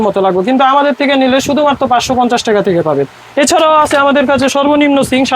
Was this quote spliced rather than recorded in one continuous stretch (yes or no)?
no